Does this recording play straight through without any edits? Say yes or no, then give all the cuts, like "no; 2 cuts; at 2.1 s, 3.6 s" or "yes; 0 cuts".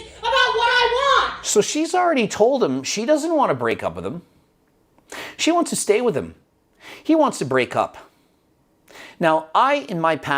yes; 0 cuts